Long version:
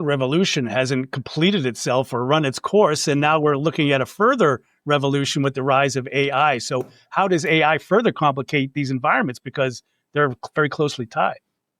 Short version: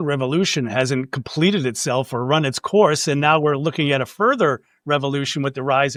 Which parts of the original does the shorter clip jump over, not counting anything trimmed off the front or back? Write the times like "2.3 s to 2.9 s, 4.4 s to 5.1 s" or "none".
none